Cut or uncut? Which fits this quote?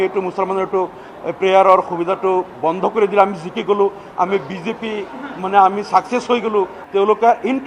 cut